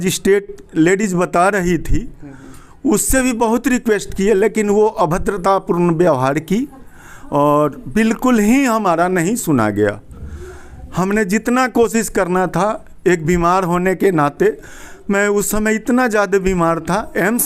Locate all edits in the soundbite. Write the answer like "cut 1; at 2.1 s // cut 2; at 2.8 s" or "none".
none